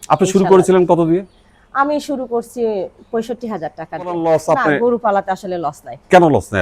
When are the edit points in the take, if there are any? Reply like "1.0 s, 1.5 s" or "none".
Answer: 4.2 s